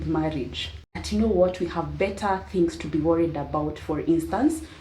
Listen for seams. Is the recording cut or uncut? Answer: cut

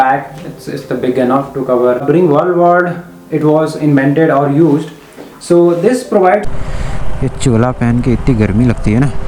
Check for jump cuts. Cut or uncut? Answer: cut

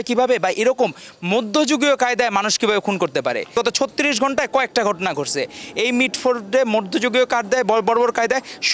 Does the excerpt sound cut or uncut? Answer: uncut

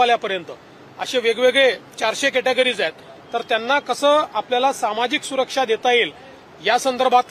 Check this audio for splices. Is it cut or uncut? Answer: uncut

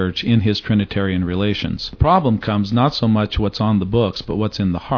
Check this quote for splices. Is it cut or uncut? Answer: cut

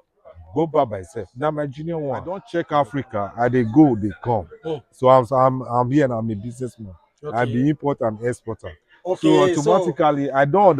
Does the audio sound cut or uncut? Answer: cut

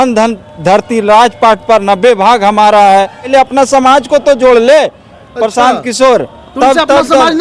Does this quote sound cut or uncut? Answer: cut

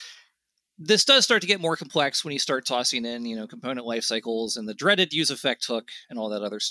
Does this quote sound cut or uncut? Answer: uncut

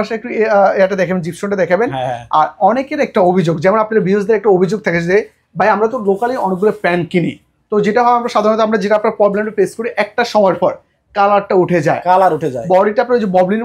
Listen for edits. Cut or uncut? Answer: uncut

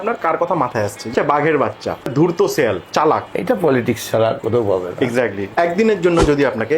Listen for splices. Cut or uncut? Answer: cut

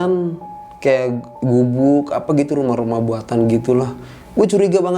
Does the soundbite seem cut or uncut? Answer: cut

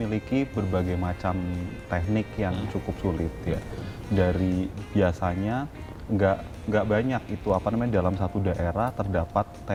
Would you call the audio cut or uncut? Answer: uncut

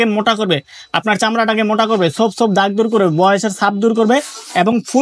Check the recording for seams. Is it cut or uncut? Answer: uncut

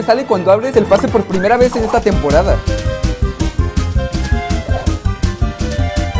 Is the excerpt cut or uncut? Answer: uncut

